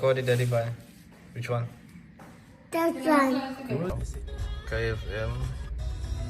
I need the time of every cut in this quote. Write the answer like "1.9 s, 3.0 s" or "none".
4.1 s